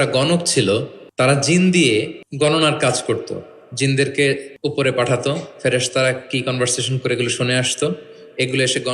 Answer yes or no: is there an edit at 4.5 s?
yes